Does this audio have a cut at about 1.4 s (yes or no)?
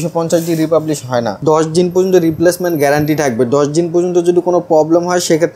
yes